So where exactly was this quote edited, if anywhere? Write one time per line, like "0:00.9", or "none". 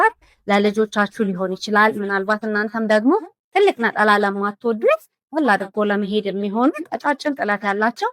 none